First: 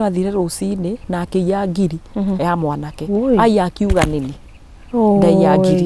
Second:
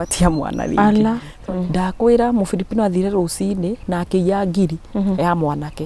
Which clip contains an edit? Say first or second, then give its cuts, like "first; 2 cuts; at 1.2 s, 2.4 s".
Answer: second; 1 cut; at 1.3 s